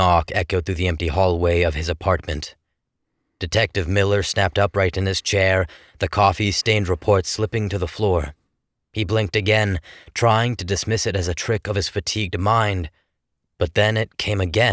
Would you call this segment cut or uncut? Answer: cut